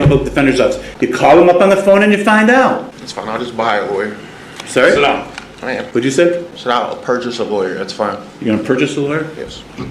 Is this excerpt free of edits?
no; 4 cuts; at 0.9 s, 2.9 s, 5.8 s, 6.5 s

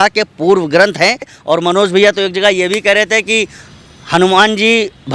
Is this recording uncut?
no; 1 cut; at 1.3 s

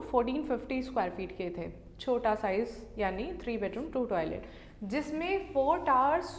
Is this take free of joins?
yes; 0 cuts

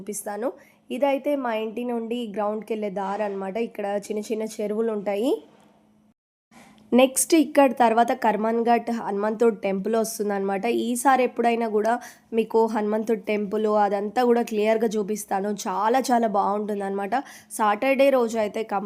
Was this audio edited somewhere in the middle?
no; 0 cuts

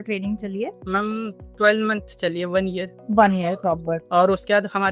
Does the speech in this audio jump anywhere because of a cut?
no; 0 cuts

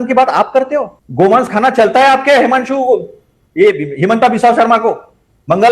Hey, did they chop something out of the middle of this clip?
yes; 1 cut; at 1.0 s

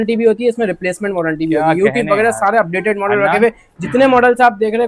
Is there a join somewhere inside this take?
no; 0 cuts

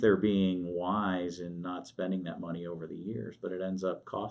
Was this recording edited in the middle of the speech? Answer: no; 0 cuts

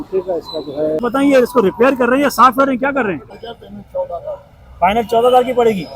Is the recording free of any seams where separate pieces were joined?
no; 2 cuts; at 1.0 s, 3.4 s

